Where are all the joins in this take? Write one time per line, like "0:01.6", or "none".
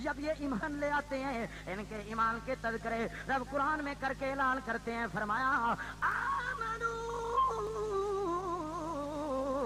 none